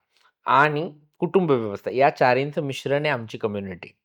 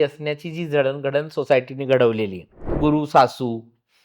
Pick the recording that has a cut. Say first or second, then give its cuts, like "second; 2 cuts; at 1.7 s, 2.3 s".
second; 1 cut; at 2.8 s